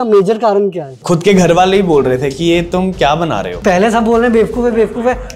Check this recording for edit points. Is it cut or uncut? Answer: cut